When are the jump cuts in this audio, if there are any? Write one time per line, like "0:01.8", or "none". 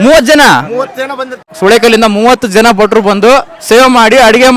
0:01.5